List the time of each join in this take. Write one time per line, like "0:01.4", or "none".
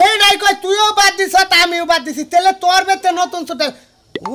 none